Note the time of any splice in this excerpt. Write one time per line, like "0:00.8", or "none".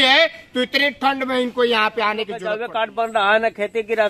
0:02.7